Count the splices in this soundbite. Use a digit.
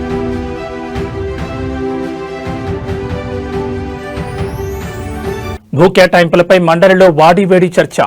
1